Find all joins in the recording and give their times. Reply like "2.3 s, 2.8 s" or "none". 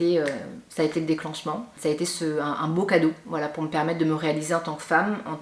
1.7 s